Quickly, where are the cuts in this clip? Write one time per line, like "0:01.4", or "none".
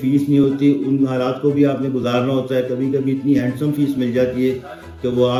none